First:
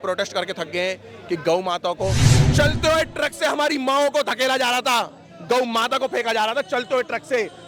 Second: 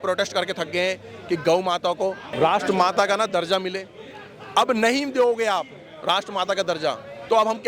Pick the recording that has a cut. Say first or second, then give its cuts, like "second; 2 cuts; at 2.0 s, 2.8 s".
first; 1 cut; at 2.2 s